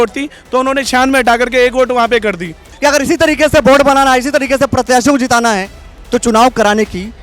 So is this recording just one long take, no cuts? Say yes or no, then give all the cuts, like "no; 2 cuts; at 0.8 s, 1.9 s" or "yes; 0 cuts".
no; 1 cut; at 2.7 s